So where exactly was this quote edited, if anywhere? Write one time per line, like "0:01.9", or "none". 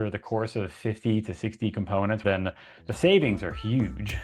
0:02.2